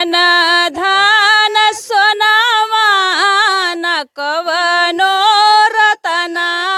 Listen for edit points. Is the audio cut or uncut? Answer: uncut